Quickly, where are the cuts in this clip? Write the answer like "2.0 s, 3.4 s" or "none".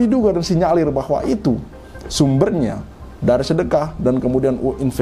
none